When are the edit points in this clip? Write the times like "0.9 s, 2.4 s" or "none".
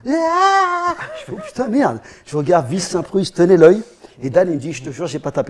none